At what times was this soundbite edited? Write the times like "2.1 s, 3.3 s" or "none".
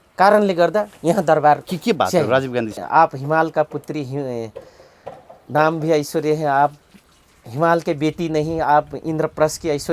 2.8 s